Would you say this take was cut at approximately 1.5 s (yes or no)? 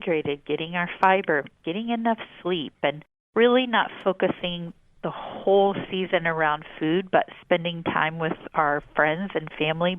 no